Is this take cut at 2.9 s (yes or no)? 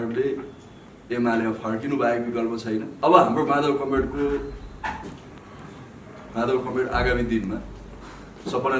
yes